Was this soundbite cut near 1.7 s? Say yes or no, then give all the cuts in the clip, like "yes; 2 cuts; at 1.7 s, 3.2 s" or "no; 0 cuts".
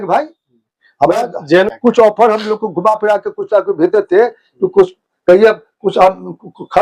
yes; 1 cut; at 1.7 s